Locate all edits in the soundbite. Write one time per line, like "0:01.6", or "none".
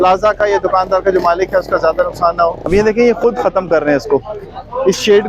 0:02.6

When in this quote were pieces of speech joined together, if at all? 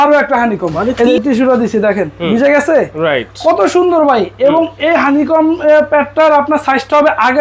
0:01.0

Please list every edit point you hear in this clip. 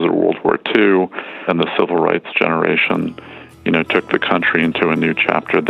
0:01.4

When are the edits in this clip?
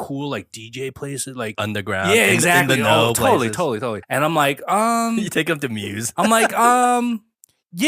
0:01.5
0:04.0

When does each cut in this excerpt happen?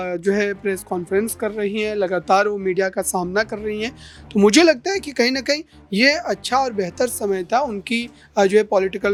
none

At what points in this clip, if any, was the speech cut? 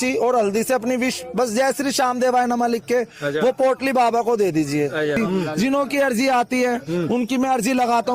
0:05.6

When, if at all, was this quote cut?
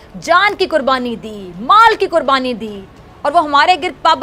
none

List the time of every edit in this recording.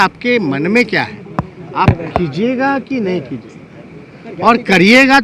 none

